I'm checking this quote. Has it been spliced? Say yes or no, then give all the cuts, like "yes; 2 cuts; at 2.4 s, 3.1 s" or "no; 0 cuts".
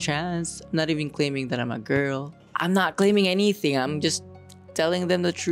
no; 0 cuts